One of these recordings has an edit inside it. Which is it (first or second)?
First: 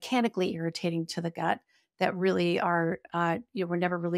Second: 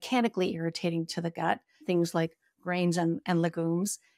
second